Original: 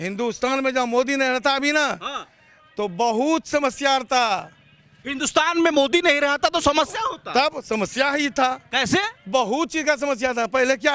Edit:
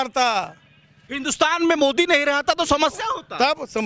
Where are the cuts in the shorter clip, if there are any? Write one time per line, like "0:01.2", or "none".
none